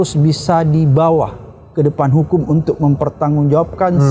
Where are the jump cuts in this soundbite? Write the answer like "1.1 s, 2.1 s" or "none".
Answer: none